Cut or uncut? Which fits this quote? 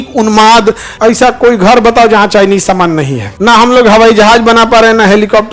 cut